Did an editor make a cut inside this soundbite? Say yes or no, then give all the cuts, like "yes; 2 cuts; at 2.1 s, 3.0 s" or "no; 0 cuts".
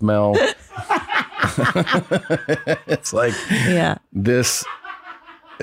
no; 0 cuts